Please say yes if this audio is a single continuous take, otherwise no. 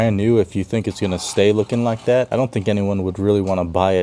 no